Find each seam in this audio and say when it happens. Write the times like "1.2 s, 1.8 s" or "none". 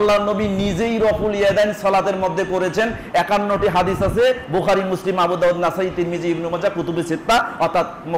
none